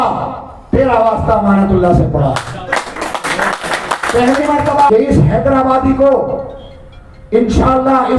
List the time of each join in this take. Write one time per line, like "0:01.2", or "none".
0:04.9